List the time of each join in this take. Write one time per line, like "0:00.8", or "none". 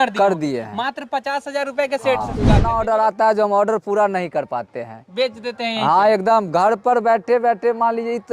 0:02.6